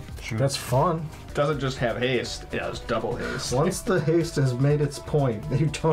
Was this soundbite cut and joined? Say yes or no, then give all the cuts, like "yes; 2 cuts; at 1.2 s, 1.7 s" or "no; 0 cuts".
yes; 1 cut; at 1.3 s